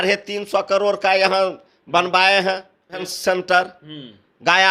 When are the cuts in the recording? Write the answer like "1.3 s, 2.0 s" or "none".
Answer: 3.1 s